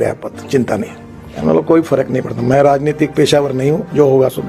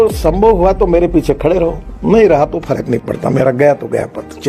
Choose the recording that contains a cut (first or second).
first